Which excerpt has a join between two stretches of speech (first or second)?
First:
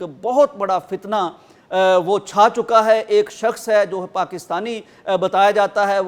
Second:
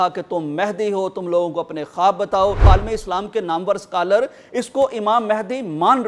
second